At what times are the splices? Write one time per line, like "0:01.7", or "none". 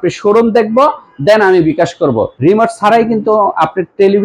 0:02.3